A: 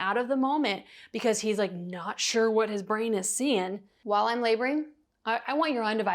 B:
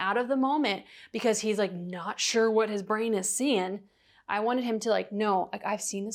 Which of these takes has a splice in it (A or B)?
A